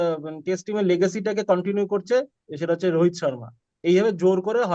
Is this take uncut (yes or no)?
yes